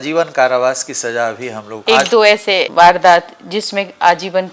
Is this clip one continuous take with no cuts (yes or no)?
no